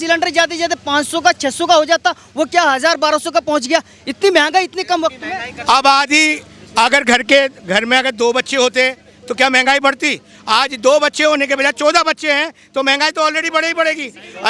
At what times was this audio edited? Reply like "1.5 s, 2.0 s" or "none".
none